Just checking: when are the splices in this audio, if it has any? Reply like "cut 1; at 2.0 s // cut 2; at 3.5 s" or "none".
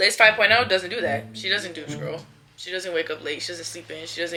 none